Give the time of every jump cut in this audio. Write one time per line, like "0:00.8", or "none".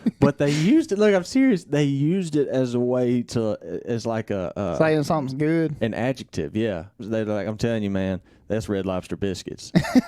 0:07.0